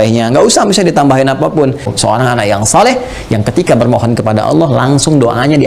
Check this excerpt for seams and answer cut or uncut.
cut